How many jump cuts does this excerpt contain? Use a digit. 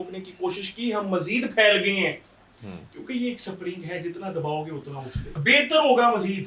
1